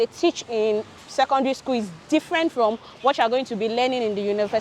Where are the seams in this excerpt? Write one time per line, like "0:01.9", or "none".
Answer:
none